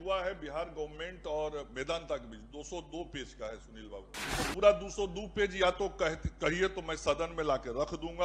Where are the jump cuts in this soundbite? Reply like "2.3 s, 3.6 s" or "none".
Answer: 4.2 s